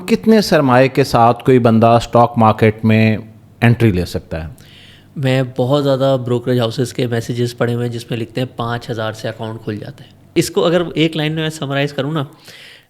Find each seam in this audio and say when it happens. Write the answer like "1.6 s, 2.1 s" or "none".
10.3 s